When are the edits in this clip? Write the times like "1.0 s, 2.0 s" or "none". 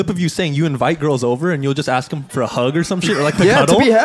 2.3 s